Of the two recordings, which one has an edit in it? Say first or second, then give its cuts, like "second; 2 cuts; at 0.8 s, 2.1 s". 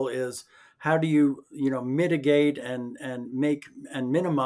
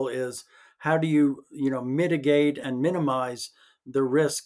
second; 1 cut; at 2.6 s